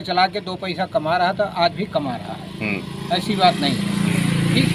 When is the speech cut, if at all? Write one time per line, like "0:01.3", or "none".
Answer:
none